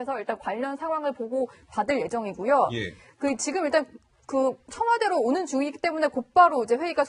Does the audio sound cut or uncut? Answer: cut